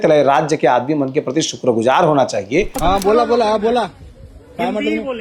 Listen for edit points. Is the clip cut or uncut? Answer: cut